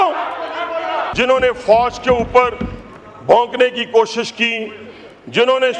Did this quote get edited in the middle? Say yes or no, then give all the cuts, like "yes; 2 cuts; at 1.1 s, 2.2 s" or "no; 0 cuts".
yes; 1 cut; at 1.1 s